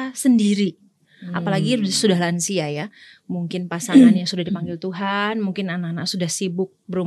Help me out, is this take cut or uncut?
uncut